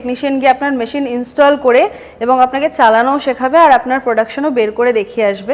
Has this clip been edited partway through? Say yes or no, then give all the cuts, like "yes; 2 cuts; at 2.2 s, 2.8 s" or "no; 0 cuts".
no; 0 cuts